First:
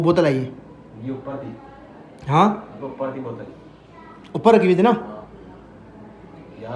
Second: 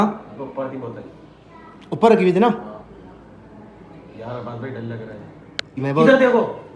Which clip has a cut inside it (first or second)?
second